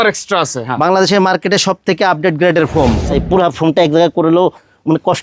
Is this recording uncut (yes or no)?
no